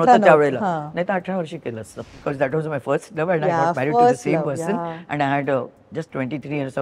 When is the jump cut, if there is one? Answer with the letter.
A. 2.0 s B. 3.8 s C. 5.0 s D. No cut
A